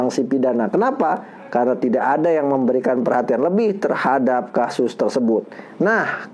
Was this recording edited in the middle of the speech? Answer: no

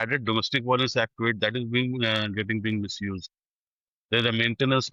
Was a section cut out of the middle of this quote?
no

